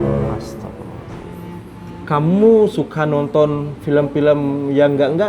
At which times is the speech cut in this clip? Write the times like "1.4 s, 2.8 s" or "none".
2.0 s

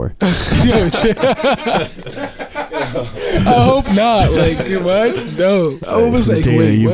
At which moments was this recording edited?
5.8 s

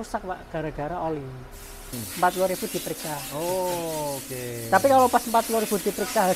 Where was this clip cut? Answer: 2.0 s

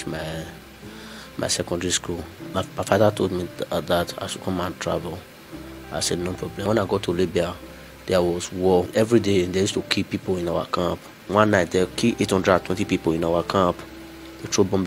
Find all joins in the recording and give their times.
2.5 s, 6.7 s, 8.9 s, 11.2 s

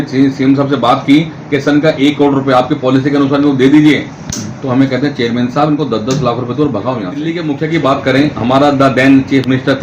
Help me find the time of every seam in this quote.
7.2 s

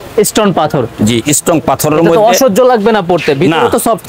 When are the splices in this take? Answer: none

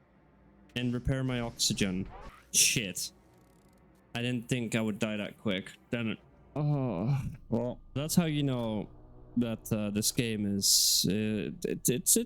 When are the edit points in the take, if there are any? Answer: 6.6 s

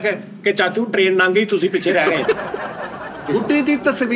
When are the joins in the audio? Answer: 3.1 s

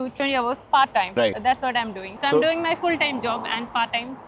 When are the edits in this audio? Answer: none

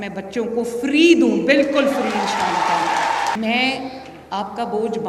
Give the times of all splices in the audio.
3.4 s

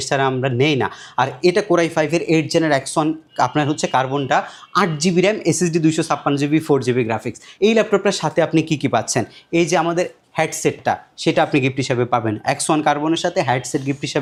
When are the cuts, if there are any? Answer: none

